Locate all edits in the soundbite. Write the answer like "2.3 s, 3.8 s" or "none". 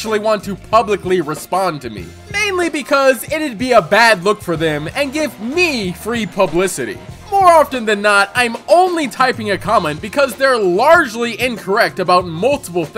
none